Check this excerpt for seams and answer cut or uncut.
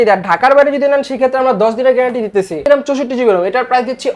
cut